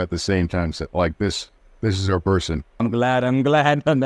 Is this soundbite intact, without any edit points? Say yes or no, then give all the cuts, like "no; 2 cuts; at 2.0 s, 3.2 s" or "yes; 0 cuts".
yes; 0 cuts